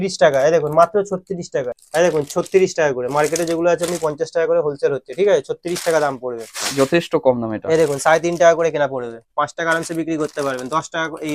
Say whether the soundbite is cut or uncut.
uncut